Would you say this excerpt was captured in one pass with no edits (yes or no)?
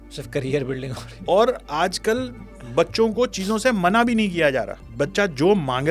no